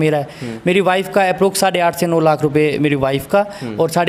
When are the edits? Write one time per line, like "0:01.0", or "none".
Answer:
none